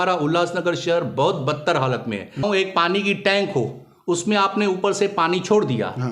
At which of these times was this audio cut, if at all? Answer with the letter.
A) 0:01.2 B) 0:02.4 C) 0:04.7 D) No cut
B